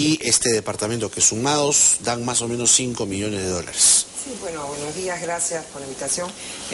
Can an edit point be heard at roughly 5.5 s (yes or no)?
yes